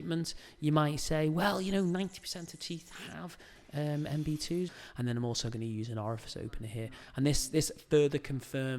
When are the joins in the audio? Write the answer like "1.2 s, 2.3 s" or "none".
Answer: 4.7 s